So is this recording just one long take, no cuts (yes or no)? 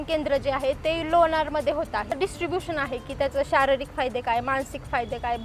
no